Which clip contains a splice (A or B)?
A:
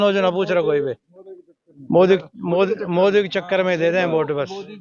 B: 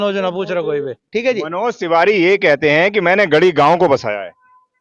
B